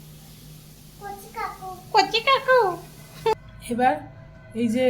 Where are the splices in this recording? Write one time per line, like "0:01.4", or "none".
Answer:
0:03.3

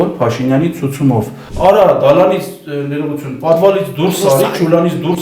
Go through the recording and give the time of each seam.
0:01.4

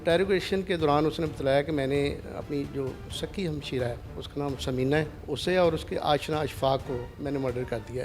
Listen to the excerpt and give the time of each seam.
0:04.1
0:05.2
0:07.1

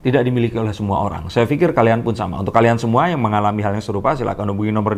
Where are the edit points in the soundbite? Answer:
none

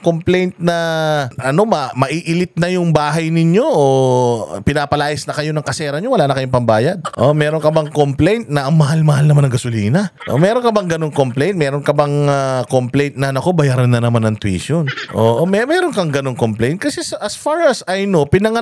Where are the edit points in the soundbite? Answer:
0:01.4
0:07.1
0:10.2
0:15.0

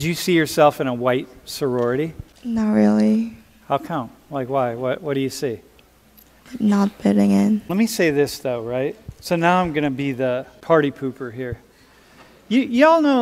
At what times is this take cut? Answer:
0:02.3
0:06.3
0:07.7
0:10.5

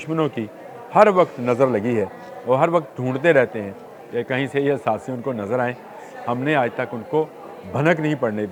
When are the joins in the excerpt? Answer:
none

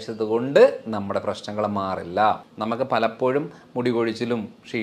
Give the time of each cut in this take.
0:02.5

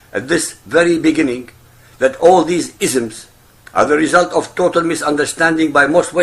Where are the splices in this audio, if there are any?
none

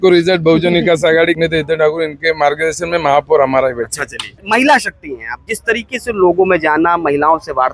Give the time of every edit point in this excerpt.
none

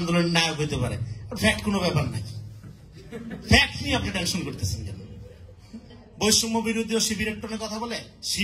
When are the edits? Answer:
0:06.0

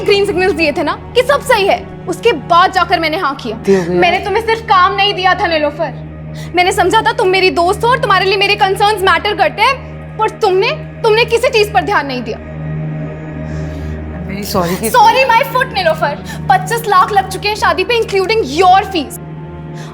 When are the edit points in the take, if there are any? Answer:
0:03.6

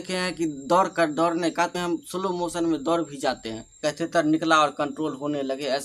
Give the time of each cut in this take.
0:01.7
0:03.7

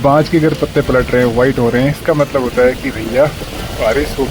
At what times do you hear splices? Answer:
0:02.0

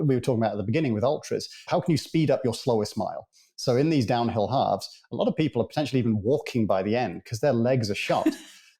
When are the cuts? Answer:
0:01.5

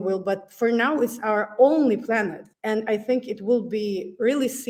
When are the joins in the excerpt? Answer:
none

